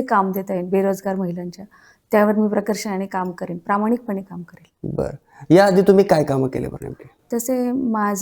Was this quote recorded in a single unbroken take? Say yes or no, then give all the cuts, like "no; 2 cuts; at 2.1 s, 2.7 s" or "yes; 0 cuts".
yes; 0 cuts